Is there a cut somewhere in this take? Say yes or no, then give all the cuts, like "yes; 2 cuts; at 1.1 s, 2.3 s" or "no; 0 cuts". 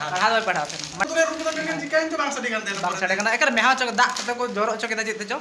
yes; 1 cut; at 1.1 s